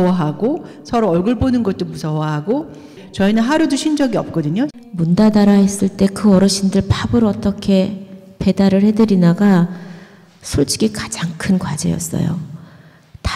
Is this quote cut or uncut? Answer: cut